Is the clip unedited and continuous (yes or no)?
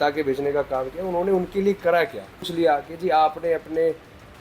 no